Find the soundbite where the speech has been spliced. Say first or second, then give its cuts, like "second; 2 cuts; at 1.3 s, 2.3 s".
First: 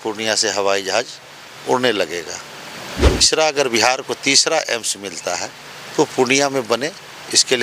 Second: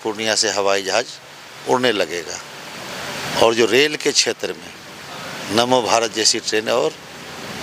first; 1 cut; at 3.3 s